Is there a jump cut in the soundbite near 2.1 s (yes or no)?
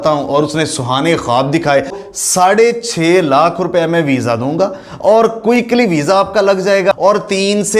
yes